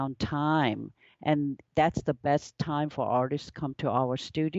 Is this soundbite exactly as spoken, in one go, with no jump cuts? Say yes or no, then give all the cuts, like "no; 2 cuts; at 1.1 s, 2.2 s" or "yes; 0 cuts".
yes; 0 cuts